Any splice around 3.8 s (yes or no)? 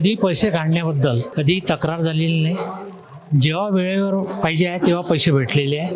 no